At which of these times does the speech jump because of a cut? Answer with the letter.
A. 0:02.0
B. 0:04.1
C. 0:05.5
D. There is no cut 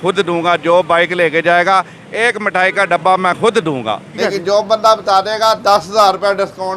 B